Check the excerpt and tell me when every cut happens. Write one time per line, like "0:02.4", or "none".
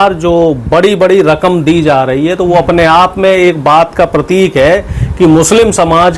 none